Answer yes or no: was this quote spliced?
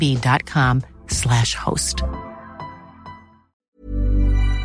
yes